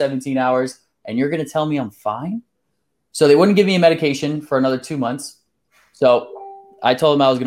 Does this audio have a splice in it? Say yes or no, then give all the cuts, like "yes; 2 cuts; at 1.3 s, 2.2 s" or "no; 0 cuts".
no; 0 cuts